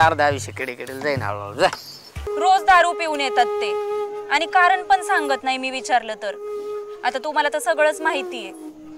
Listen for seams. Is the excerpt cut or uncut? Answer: cut